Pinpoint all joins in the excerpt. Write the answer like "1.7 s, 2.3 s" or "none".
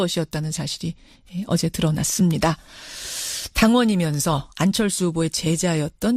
1.5 s